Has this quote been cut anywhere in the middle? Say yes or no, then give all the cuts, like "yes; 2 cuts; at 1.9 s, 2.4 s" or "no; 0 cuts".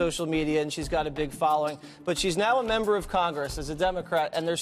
no; 0 cuts